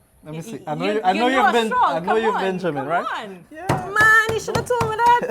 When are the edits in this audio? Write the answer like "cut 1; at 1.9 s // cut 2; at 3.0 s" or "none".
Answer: cut 1; at 3.4 s

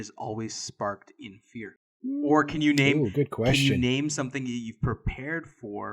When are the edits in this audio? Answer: cut 1; at 1.8 s

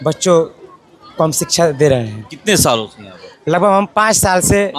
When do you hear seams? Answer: none

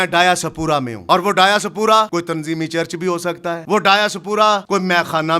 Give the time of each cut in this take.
cut 1; at 0.9 s // cut 2; at 2.1 s // cut 3; at 3.6 s // cut 4; at 4.6 s

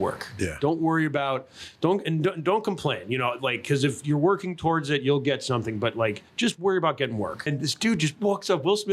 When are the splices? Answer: cut 1; at 7.5 s

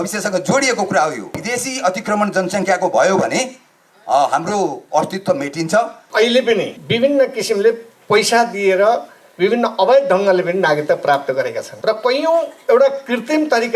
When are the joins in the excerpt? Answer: cut 1; at 1.4 s // cut 2; at 6.0 s // cut 3; at 6.8 s // cut 4; at 11.7 s

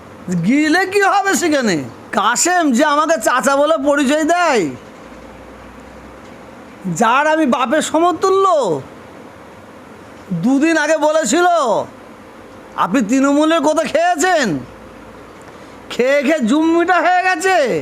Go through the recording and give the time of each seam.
cut 1; at 2.0 s

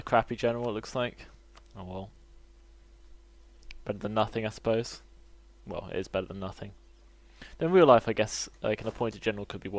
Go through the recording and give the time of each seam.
cut 1; at 2.2 s

